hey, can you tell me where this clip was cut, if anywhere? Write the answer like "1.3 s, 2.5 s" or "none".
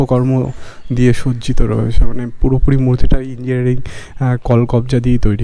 none